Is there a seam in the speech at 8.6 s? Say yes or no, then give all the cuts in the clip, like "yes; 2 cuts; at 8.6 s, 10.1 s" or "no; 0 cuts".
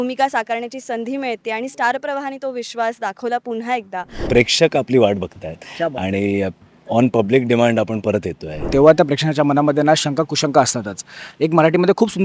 yes; 2 cuts; at 4.1 s, 8.6 s